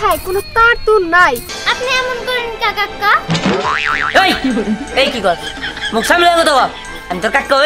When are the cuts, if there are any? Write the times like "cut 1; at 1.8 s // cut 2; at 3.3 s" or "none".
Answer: cut 1; at 1.5 s